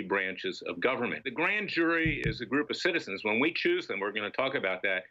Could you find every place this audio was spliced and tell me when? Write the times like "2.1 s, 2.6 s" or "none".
1.2 s